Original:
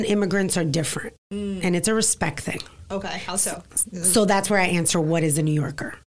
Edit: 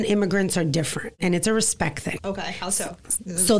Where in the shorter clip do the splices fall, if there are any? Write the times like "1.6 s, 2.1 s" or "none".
1.1 s, 2.2 s